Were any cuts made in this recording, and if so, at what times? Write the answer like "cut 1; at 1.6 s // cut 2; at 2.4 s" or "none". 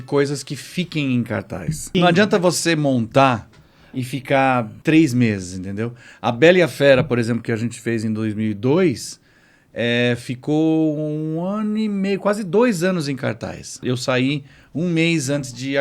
cut 1; at 1.9 s // cut 2; at 4.7 s // cut 3; at 13.8 s